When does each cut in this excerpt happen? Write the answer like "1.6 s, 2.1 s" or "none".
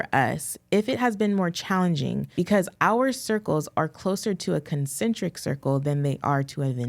2.2 s

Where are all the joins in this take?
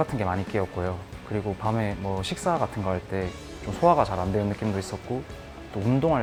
none

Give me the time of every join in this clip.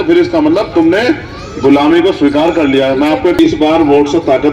3.4 s

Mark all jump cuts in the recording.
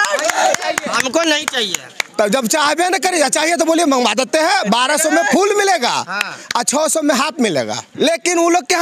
7.8 s

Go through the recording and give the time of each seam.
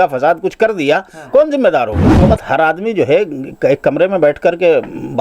2.1 s

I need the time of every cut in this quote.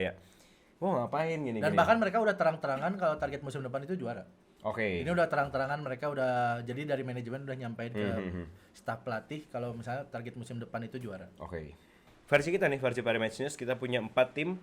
12.1 s

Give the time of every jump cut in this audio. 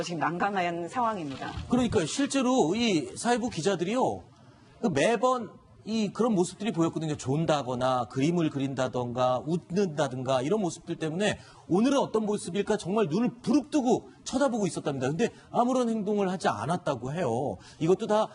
none

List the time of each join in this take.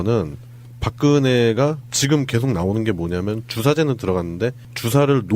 1.8 s

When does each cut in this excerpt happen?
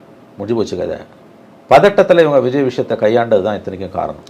none

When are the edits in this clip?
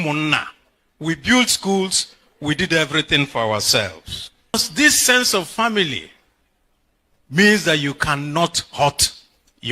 4.5 s

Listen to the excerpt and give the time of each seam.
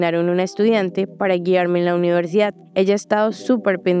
2.6 s

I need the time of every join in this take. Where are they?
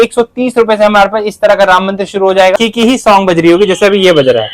2.5 s

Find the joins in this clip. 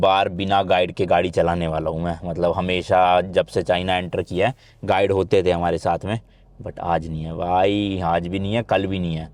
none

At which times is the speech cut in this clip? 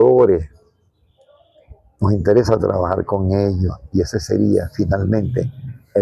none

